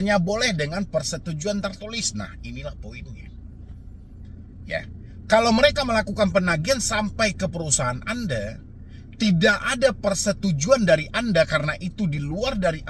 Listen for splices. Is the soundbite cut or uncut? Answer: uncut